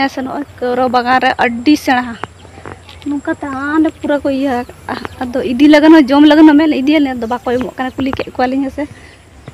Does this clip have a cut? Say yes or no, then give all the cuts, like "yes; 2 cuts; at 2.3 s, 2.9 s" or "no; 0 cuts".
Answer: no; 0 cuts